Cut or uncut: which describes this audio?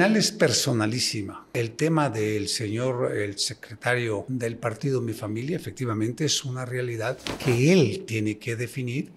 cut